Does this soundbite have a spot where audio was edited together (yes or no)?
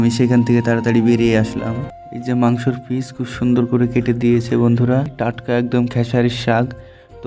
yes